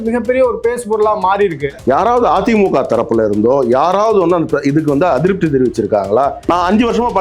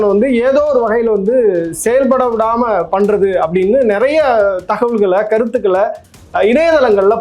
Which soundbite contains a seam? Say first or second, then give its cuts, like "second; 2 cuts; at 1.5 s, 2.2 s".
first; 2 cuts; at 1.6 s, 6.4 s